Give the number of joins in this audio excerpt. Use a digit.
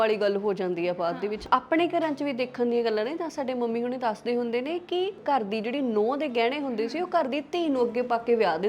2